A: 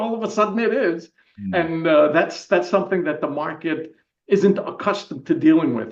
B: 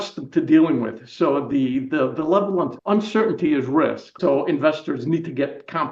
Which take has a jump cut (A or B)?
B